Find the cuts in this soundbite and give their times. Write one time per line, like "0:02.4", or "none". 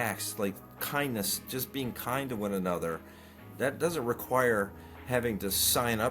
none